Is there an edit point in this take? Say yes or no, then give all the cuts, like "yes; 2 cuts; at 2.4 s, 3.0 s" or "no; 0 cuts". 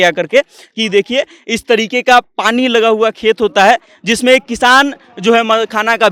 no; 0 cuts